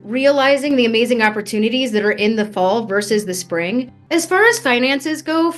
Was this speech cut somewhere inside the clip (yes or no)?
yes